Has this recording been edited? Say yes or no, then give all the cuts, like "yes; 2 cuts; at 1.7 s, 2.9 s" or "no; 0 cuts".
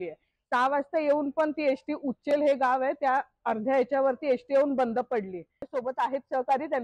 yes; 1 cut; at 5.7 s